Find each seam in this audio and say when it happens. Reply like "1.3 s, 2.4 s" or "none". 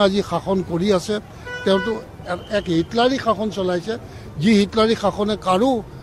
none